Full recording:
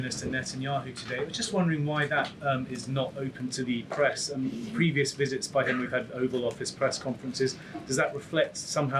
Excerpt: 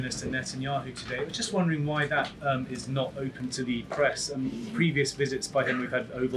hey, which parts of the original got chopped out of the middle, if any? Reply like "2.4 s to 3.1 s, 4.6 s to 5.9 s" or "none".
none